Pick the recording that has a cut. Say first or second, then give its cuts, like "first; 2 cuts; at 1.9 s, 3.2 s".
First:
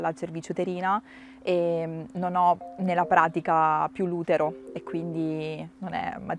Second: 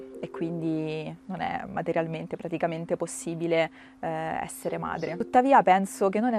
second; 1 cut; at 5.1 s